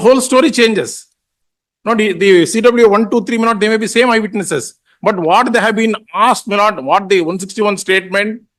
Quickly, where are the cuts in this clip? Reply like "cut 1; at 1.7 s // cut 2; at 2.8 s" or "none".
none